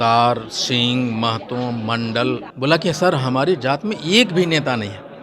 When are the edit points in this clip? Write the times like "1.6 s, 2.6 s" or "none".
2.5 s